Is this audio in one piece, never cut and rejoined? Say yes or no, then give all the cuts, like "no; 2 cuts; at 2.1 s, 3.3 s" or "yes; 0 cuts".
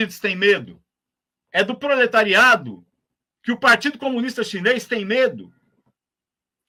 yes; 0 cuts